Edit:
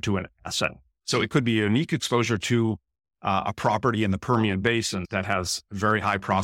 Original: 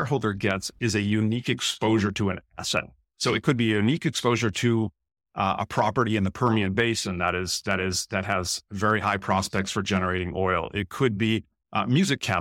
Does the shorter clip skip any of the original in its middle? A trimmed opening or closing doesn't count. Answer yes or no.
yes